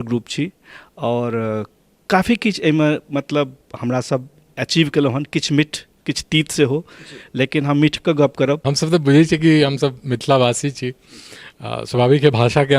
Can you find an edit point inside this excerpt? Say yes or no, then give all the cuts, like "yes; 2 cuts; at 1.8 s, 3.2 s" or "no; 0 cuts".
yes; 1 cut; at 8.7 s